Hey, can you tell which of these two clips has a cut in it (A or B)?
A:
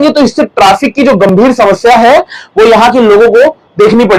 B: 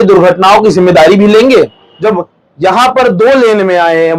B